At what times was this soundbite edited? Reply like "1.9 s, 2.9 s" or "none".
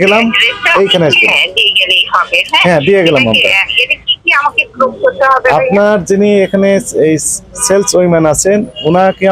none